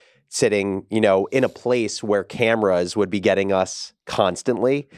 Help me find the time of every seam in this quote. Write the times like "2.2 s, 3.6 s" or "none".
none